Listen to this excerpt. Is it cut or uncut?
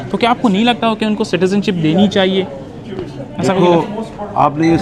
uncut